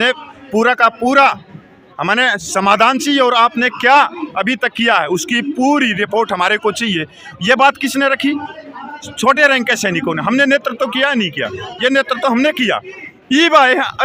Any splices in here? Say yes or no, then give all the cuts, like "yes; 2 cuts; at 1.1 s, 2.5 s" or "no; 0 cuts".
no; 0 cuts